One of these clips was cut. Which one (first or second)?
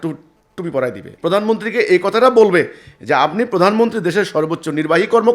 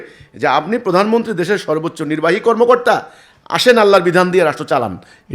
first